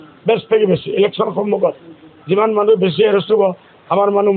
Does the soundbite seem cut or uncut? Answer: uncut